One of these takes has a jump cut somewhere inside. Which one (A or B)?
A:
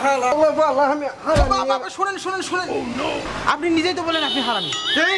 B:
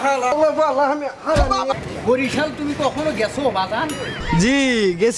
B